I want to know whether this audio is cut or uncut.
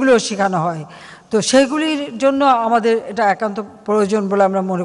uncut